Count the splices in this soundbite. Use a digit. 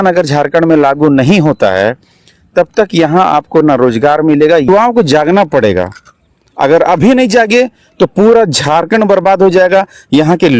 1